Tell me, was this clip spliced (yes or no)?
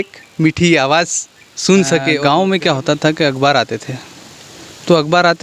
yes